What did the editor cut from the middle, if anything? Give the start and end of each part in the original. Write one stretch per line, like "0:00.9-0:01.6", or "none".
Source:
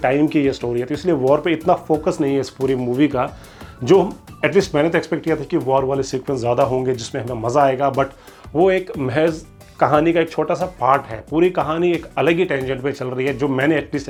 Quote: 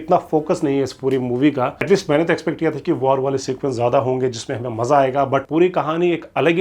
0:03.3-0:04.4
0:08.1-0:11.3